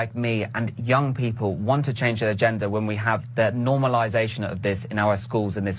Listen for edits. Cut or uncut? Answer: uncut